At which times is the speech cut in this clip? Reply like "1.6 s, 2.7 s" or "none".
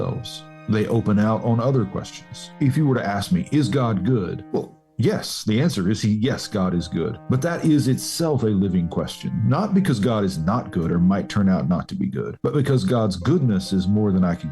2.5 s, 4.4 s, 7.2 s, 12.3 s

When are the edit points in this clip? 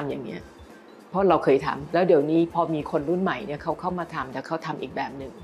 1.8 s

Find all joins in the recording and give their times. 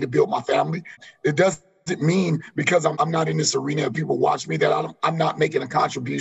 1.0 s, 2.9 s

